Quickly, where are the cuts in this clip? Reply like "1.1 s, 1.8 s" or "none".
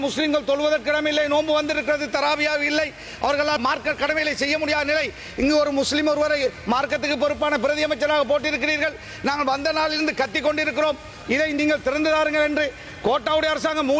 3.6 s